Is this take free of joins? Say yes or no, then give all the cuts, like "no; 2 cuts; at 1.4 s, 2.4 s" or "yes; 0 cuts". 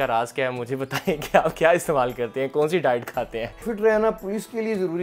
no; 1 cut; at 3.7 s